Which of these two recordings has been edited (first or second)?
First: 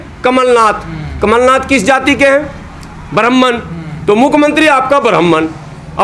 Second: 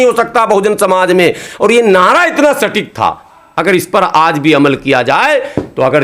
second